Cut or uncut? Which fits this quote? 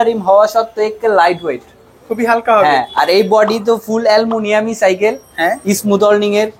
uncut